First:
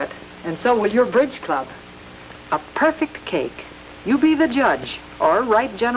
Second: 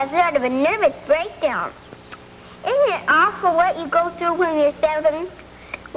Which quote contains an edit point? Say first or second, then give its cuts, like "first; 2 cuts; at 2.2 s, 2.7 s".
first; 1 cut; at 3.6 s